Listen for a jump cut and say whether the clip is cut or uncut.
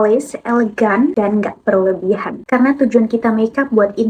cut